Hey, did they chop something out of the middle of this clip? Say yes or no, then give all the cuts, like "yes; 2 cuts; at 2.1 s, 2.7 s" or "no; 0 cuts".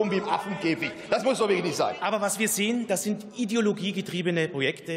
yes; 1 cut; at 2.0 s